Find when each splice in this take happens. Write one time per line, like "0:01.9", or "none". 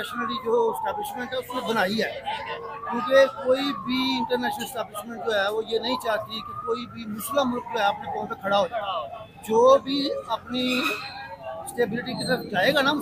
none